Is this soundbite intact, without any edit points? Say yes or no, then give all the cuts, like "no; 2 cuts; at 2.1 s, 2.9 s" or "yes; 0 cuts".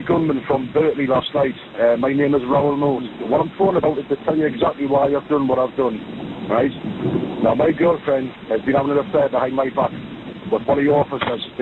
yes; 0 cuts